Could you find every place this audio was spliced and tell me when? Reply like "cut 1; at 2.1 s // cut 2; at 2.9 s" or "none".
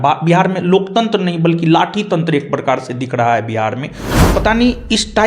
cut 1; at 4.1 s